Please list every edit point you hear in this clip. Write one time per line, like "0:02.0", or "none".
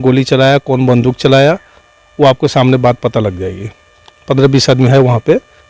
none